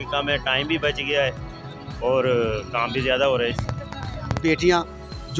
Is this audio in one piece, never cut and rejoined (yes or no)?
no